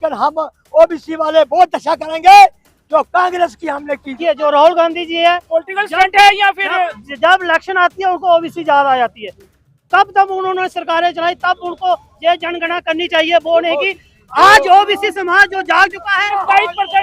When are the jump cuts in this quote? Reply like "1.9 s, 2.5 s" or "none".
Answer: 4.2 s, 16.3 s